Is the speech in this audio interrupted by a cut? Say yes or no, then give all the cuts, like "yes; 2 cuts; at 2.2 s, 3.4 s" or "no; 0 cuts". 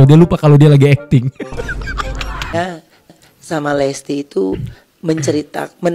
yes; 1 cut; at 2.5 s